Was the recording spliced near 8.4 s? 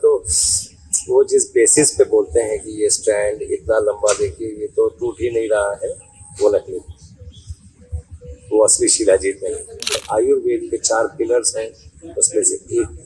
no; 1 cut; at 10.0 s

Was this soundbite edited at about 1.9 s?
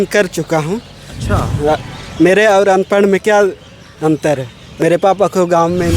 no; 1 cut; at 4.8 s

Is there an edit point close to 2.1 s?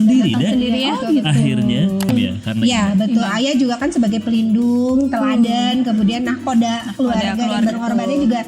yes; 1 cut; at 2.1 s

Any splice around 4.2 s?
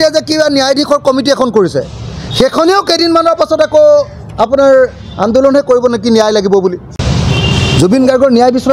no; 1 cut; at 6.9 s

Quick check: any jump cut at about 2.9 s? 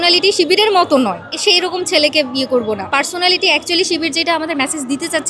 yes; 2 cuts; at 1.3 s, 2.9 s

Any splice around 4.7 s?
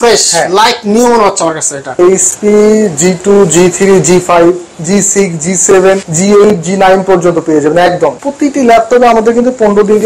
no; 3 cuts; at 2.0 s, 6.1 s, 8.2 s

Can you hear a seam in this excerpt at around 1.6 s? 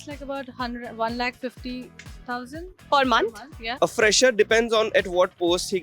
no; 2 cuts; at 2.8 s, 3.6 s

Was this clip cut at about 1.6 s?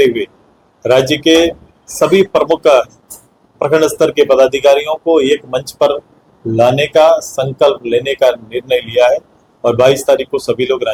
no; 0 cuts

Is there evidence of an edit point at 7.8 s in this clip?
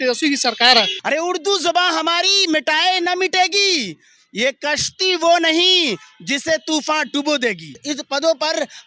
yes; 2 cuts; at 1.0 s, 7.8 s

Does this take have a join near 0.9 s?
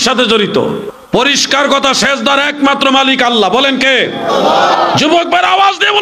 yes; 1 cut; at 0.9 s

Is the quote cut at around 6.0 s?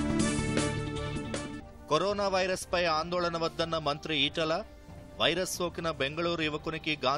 no; 1 cut; at 1.6 s

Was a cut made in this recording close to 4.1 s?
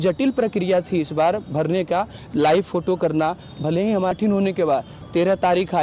yes; 1 cut; at 4.1 s

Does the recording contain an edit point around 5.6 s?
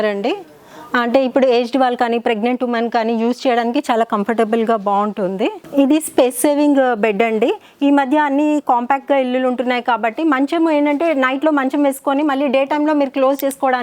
yes; 1 cut; at 5.6 s

